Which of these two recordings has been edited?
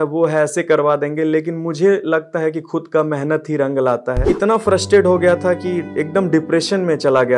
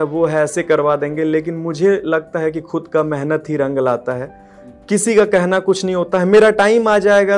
first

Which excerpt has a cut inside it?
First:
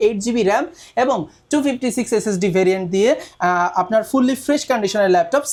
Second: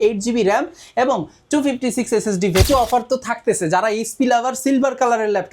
second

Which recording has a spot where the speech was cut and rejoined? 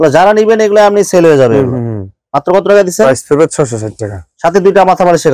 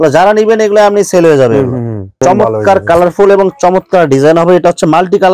second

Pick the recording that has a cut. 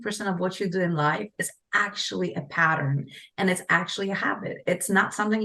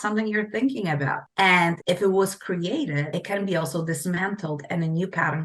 second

